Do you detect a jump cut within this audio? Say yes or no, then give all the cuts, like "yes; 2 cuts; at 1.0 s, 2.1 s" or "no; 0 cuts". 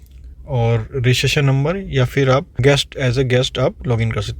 yes; 1 cut; at 2.6 s